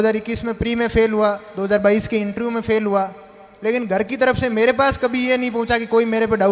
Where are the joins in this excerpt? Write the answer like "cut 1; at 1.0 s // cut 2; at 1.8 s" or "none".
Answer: none